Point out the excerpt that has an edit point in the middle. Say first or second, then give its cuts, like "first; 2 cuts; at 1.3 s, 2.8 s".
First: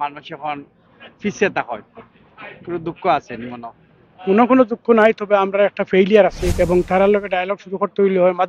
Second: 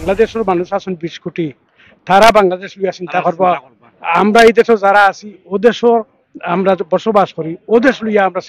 first; 1 cut; at 6.4 s